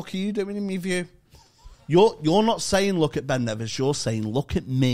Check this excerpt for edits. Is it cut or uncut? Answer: uncut